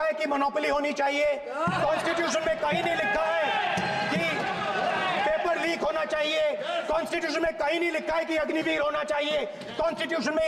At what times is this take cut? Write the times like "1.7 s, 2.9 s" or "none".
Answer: none